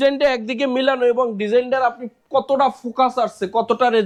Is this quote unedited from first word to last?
yes; 0 cuts

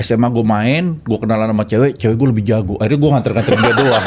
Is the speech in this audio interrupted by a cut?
no; 0 cuts

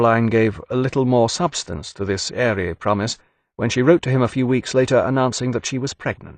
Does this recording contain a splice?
no; 0 cuts

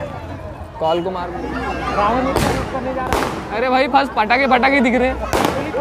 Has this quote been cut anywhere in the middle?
yes; 1 cut; at 1.2 s

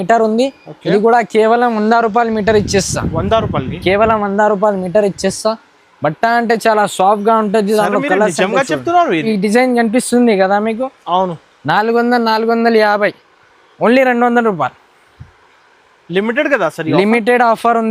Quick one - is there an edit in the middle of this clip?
yes; 1 cut; at 9.2 s

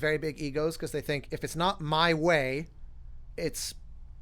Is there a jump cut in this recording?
yes; 1 cut; at 3.2 s

